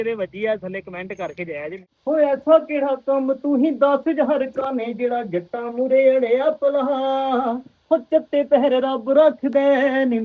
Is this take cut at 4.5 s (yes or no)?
no